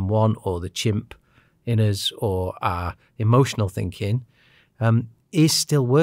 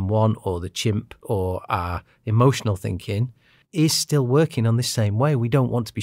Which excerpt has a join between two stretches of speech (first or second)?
second